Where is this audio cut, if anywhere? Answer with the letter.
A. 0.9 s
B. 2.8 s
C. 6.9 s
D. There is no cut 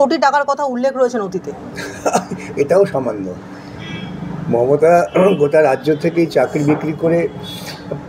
D